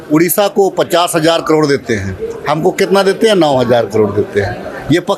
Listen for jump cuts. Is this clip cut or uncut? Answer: uncut